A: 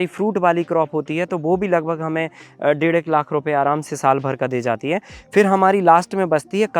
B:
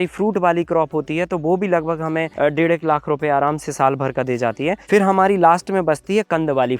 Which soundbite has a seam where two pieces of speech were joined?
B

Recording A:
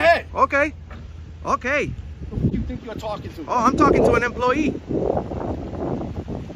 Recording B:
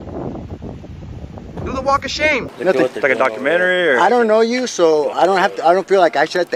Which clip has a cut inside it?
B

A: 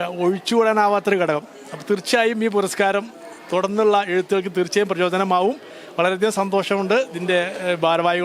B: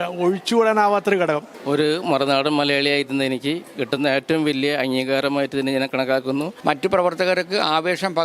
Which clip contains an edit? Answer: B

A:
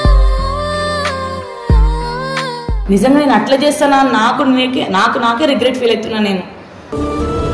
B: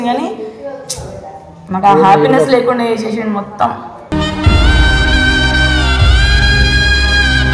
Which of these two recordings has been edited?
A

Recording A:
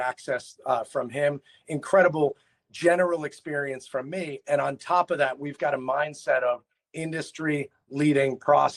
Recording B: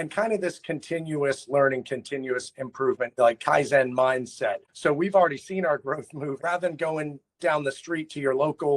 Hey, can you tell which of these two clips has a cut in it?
B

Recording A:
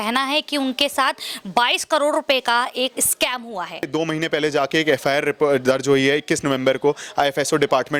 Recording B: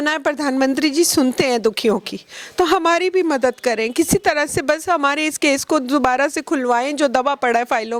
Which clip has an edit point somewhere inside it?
A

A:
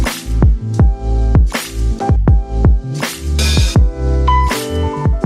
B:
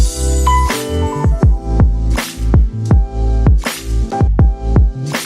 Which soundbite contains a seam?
A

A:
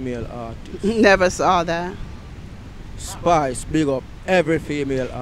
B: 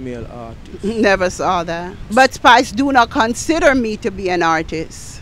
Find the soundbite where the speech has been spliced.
B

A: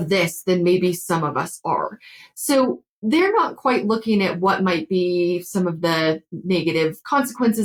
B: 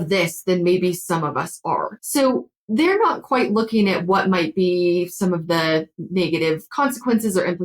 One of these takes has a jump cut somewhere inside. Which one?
B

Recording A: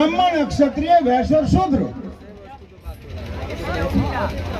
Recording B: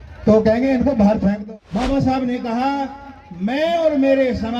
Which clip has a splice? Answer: B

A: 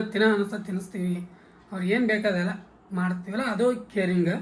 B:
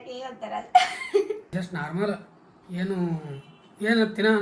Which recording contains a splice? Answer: B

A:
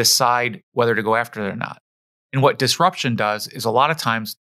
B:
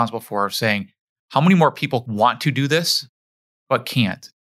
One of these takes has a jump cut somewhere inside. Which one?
B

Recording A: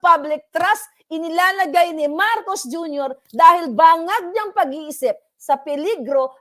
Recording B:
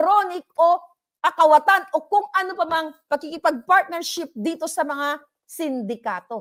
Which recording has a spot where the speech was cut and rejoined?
A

